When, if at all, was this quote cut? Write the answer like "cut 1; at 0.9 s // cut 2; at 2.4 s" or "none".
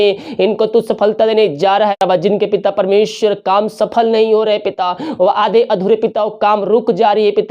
cut 1; at 2.0 s

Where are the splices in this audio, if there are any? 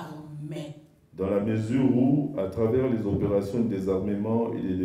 cut 1; at 1.0 s

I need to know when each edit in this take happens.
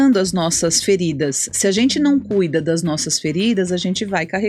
none

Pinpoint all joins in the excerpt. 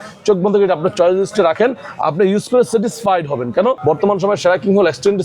cut 1; at 3.8 s

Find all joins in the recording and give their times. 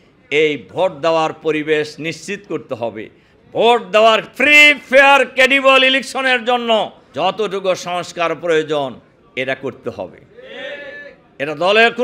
cut 1; at 7.0 s

